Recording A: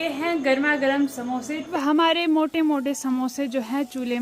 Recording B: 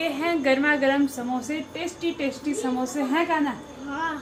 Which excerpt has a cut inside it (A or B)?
A